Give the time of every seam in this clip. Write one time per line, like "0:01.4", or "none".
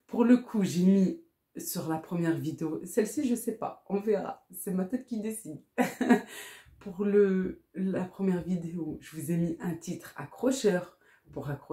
none